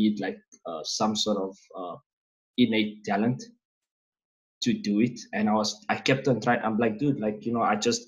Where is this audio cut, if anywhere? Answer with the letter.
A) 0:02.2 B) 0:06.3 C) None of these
C